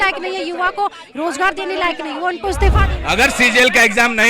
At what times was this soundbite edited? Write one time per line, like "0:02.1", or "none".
0:02.9